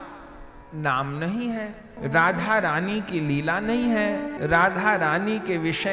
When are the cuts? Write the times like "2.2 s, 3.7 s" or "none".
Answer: 1.9 s, 4.3 s